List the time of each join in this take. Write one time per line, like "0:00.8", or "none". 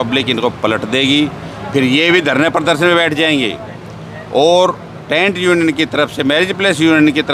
none